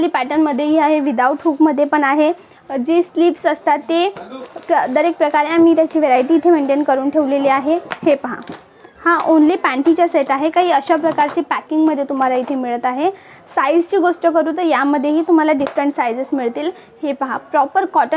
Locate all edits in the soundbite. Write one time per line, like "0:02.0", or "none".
0:07.9